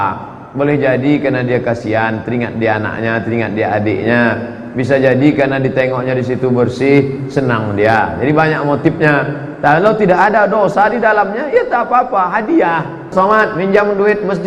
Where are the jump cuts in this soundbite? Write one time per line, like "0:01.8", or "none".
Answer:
0:13.1